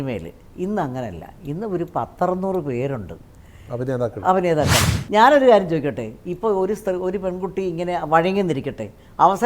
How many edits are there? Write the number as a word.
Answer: one